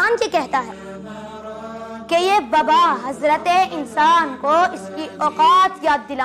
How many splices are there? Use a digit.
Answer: 0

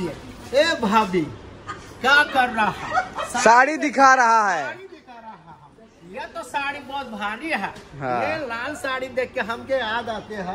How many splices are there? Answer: 0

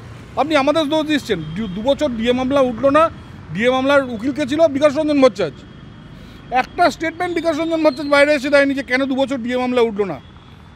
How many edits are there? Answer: 0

